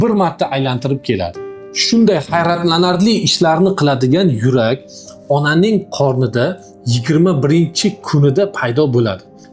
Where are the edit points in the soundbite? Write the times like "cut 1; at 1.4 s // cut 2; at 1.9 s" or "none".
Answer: none